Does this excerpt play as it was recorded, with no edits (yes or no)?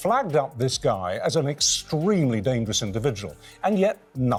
yes